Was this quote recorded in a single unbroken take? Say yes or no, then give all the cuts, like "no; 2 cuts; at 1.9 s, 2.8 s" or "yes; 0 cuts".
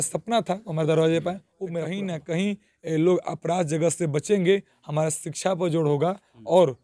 no; 1 cut; at 1.6 s